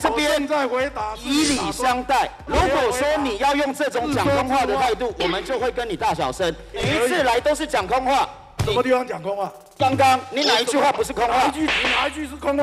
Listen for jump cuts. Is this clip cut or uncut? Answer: cut